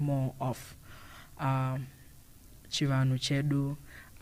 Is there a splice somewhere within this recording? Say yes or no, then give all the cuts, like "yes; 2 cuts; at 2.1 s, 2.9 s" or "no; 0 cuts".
no; 0 cuts